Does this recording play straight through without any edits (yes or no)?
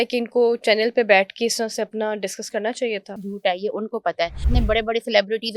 no